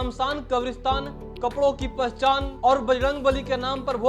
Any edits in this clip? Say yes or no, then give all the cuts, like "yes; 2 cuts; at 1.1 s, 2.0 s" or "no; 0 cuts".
yes; 1 cut; at 2.5 s